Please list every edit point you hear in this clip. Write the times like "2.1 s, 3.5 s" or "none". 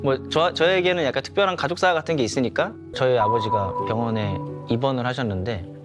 2.9 s